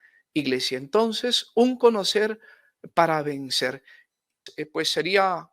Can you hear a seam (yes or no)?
yes